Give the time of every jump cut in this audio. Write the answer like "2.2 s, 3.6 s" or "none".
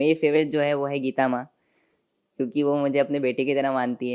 none